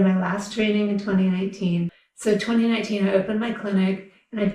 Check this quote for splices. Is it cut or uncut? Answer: cut